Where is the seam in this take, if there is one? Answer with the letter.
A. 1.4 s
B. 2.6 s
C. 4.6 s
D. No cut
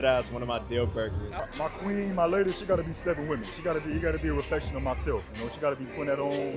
A